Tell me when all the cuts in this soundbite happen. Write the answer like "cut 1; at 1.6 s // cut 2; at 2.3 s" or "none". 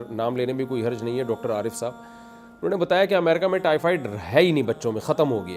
none